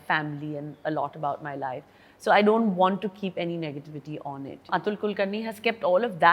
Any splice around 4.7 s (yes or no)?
yes